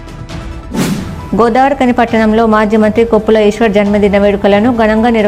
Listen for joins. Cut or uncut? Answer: cut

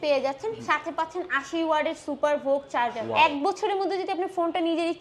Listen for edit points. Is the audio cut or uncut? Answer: cut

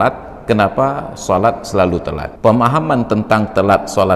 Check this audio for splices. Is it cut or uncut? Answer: cut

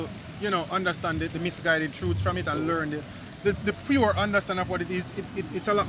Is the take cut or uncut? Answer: uncut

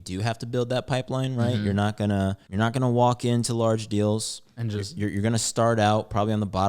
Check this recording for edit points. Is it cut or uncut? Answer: cut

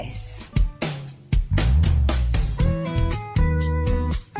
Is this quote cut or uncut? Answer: cut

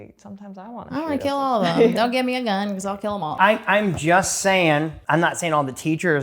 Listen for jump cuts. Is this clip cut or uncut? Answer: cut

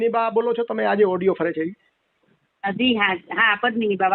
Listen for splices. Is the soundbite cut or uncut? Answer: uncut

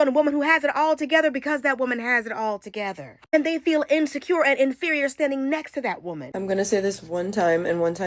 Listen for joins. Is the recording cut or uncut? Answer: cut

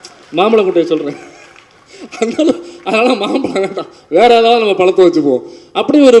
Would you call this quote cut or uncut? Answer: uncut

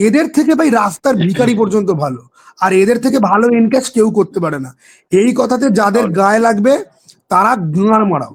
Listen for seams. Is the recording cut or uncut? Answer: uncut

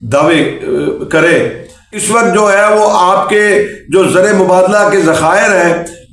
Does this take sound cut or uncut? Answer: cut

